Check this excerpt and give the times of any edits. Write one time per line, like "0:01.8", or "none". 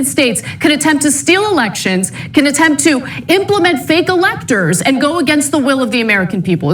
0:02.5